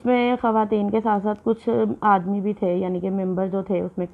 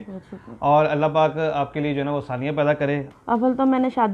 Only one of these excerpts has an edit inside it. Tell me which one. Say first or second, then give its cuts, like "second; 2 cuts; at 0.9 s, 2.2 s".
second; 1 cut; at 3.1 s